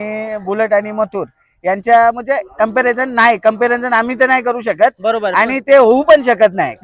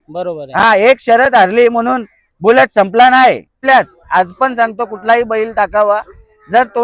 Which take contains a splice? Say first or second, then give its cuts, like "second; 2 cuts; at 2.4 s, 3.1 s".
second; 1 cut; at 3.5 s